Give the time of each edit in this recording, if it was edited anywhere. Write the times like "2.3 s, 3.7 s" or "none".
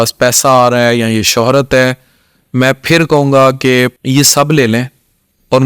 4.0 s